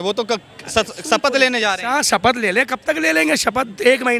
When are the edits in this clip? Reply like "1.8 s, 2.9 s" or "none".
none